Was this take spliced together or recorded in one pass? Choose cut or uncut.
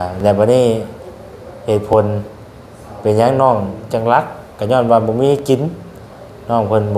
uncut